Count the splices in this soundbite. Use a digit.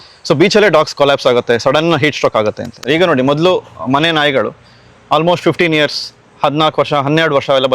1